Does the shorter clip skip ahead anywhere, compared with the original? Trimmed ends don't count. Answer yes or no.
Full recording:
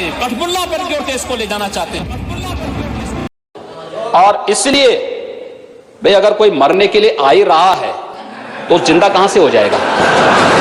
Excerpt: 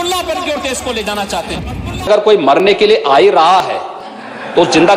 yes